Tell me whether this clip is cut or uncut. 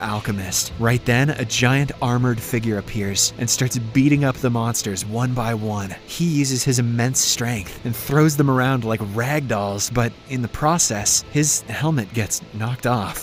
uncut